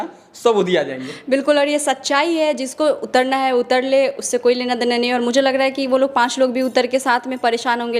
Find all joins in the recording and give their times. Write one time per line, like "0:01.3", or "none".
none